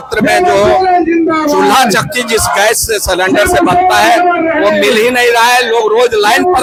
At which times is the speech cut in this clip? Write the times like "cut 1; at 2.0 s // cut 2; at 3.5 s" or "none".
none